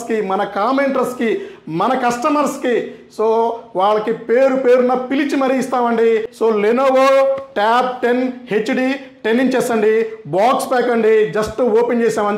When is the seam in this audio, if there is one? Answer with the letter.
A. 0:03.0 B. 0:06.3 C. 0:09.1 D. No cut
B